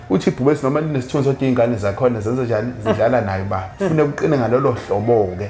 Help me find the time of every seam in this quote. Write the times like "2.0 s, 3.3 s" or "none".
3.6 s